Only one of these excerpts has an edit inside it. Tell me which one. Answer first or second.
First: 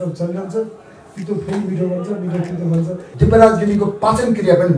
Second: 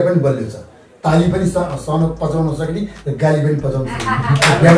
first